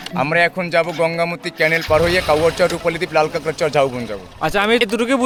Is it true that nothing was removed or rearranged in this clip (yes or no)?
yes